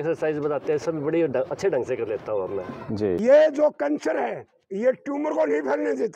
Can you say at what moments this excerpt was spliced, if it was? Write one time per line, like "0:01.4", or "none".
0:03.2